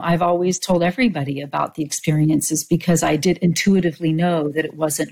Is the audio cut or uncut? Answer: uncut